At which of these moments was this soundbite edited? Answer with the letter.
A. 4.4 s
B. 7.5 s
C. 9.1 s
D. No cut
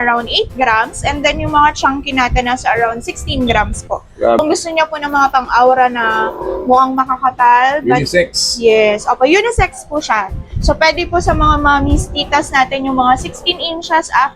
A